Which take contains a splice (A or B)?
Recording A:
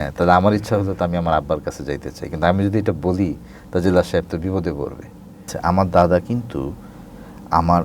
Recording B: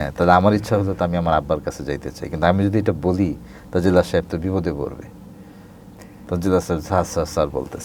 A